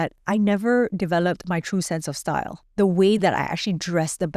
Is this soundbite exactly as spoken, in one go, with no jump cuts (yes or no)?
no